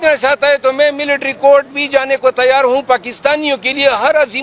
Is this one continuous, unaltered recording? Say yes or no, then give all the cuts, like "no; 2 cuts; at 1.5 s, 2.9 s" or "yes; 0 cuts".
yes; 0 cuts